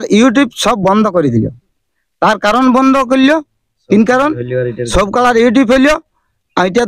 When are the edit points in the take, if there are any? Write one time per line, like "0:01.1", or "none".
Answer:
none